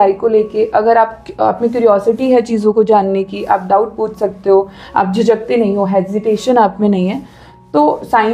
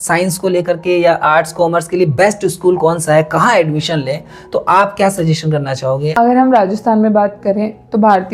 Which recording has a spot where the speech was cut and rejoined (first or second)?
second